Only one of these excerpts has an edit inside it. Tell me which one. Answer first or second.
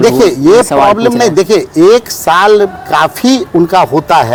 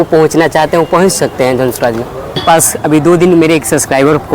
second